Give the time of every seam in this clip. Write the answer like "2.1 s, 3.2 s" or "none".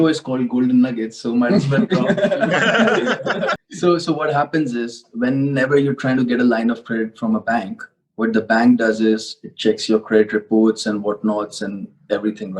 3.7 s